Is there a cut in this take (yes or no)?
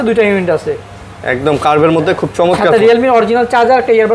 no